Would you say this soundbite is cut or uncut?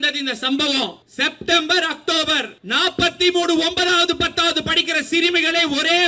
cut